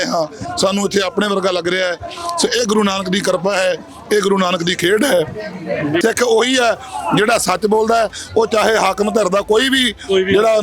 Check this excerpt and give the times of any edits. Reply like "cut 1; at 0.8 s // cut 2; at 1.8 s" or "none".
cut 1; at 6.0 s